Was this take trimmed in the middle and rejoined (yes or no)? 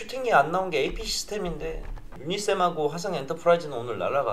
no